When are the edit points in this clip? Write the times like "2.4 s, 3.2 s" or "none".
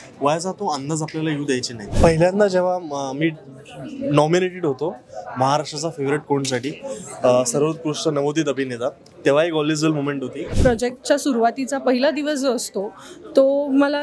1.8 s, 10.5 s